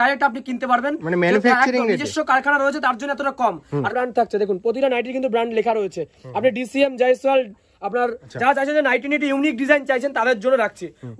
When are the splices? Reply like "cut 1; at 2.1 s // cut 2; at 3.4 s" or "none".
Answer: cut 1; at 3.9 s // cut 2; at 8.2 s